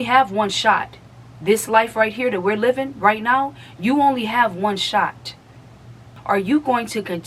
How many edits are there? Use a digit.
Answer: 1